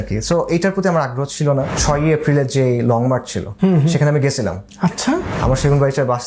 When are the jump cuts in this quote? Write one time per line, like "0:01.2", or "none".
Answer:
0:01.7
0:03.4
0:04.6